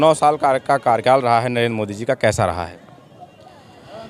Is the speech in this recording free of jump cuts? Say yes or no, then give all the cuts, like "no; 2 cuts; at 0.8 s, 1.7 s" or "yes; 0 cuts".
yes; 0 cuts